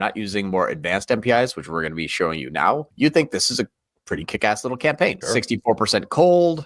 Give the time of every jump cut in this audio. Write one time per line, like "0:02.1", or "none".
0:02.9
0:05.2